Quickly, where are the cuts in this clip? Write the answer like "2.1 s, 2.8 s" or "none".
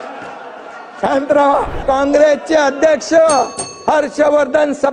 1.8 s